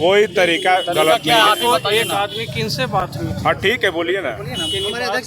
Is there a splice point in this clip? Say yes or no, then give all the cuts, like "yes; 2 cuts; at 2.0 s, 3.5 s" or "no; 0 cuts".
no; 0 cuts